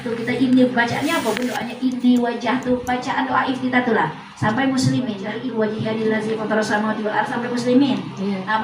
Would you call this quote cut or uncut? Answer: cut